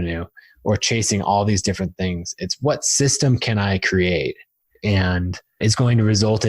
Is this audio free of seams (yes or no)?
no